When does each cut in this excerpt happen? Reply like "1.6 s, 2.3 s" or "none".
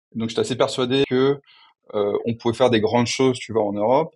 1.0 s